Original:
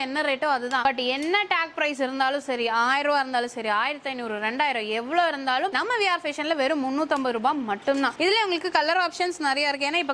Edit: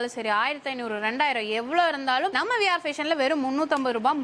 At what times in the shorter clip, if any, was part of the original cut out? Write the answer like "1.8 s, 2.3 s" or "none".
none